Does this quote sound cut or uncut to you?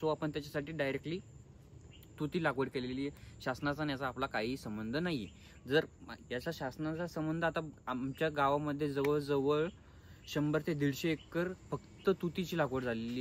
uncut